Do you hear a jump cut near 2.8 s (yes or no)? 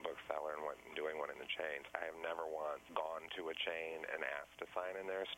yes